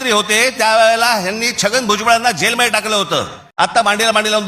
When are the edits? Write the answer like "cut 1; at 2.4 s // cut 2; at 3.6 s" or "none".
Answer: cut 1; at 3.4 s

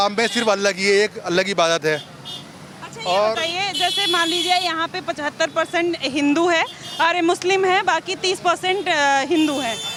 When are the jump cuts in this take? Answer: none

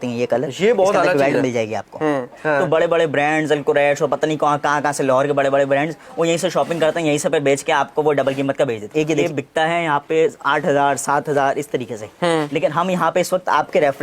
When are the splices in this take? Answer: cut 1; at 2.3 s // cut 2; at 9.1 s

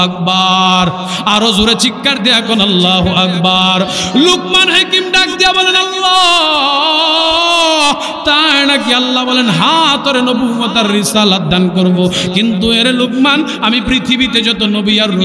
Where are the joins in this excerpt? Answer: none

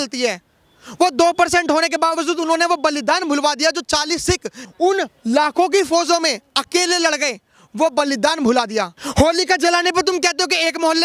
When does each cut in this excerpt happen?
cut 1; at 4.6 s // cut 2; at 8.9 s

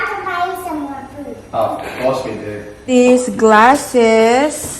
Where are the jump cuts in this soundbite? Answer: cut 1; at 2.9 s

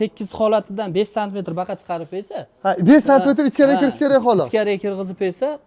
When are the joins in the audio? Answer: none

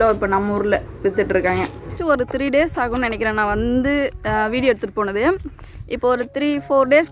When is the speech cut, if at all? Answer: cut 1; at 2.0 s

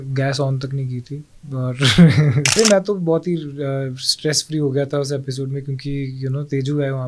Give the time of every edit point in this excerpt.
cut 1; at 2.6 s

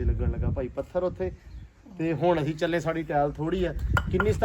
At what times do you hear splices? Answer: none

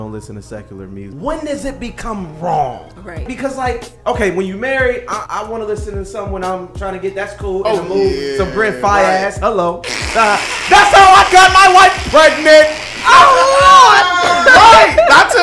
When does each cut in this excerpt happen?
cut 1; at 1.0 s // cut 2; at 3.3 s // cut 3; at 5.2 s

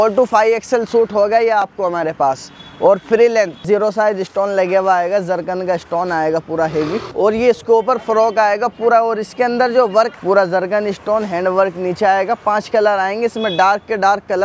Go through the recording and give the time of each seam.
cut 1; at 3.6 s // cut 2; at 7.0 s // cut 3; at 10.1 s

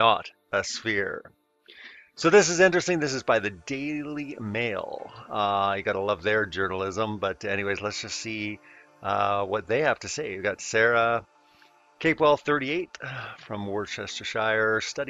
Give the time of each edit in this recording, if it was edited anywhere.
cut 1; at 5.6 s

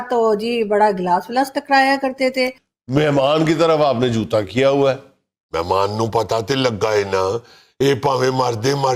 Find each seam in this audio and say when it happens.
cut 1; at 2.7 s

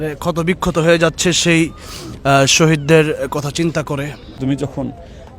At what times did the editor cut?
cut 1; at 4.4 s

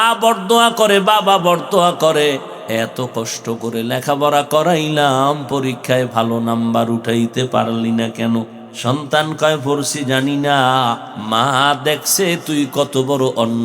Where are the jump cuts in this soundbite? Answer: cut 1; at 2.5 s // cut 2; at 8.6 s // cut 3; at 11.1 s

